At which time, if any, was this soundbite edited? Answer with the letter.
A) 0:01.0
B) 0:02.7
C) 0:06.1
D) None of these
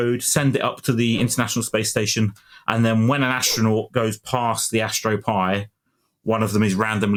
D